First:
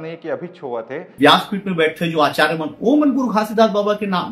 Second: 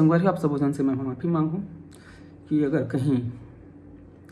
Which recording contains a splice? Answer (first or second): first